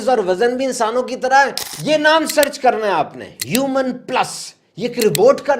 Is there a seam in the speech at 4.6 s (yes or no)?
no